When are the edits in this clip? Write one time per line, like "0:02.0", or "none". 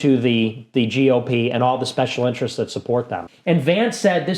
0:03.2

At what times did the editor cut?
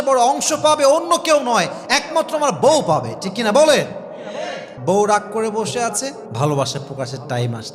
0:04.7

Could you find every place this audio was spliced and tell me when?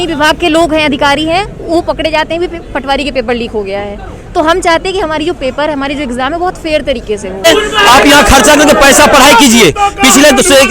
0:07.4

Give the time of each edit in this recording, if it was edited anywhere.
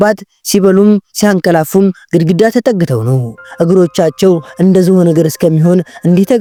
none

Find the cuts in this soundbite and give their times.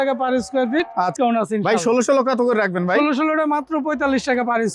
0:01.1

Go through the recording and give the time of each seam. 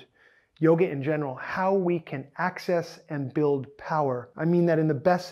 0:04.3

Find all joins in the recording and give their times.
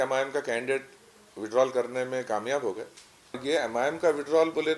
0:03.4

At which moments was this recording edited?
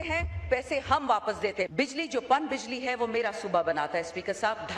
0:01.7

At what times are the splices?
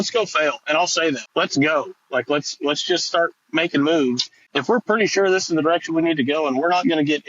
0:01.2
0:04.3

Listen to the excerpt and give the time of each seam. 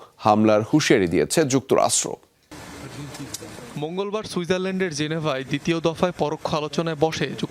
0:02.5

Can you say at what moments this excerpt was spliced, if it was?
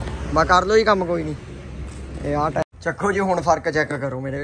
0:02.6

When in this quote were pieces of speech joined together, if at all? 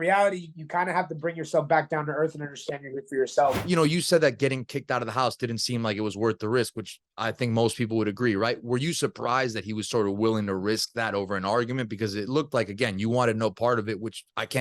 0:03.6

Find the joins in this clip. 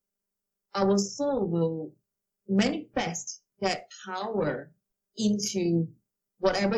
none

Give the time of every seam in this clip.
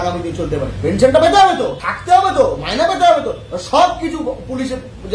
none

